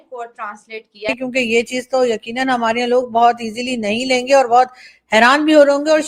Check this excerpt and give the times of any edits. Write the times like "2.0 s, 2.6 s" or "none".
1.1 s